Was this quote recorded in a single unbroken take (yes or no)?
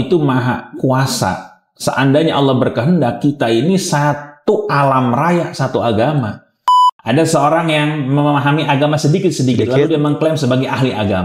no